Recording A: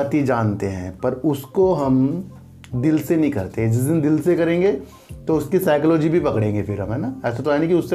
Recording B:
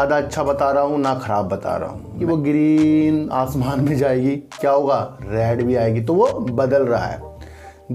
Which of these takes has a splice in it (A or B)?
B